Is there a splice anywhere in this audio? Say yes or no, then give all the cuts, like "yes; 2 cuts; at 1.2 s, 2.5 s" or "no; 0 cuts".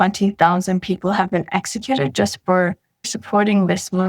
yes; 1 cut; at 3.2 s